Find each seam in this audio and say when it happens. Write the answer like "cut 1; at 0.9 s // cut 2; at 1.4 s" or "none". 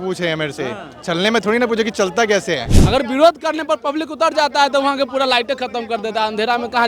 cut 1; at 2.7 s